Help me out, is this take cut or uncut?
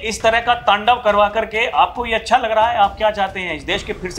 uncut